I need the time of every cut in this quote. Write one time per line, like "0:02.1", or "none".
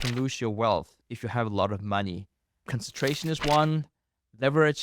0:02.7